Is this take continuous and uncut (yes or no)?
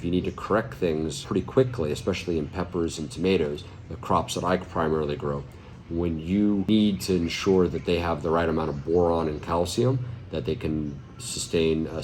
no